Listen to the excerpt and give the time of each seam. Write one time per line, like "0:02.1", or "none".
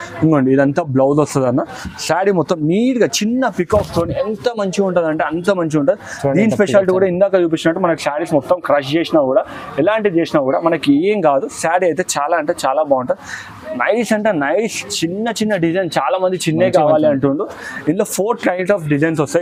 none